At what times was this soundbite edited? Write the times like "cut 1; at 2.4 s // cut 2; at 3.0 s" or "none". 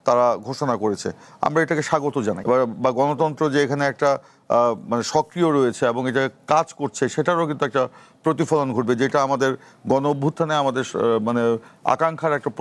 cut 1; at 2.4 s